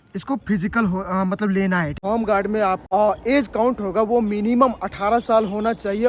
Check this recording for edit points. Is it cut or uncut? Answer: cut